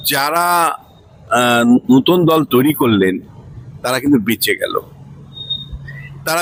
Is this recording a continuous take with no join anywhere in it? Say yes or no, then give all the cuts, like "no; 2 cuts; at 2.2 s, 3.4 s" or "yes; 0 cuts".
yes; 0 cuts